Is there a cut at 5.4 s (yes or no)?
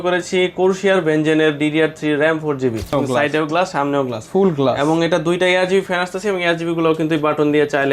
no